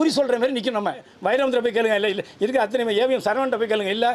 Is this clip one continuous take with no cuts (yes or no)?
no